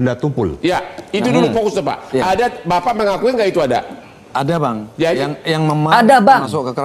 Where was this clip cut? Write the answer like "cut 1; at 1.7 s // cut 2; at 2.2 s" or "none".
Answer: none